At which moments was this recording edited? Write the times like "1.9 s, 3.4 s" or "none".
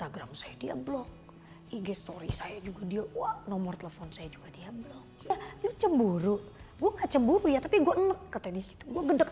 5.3 s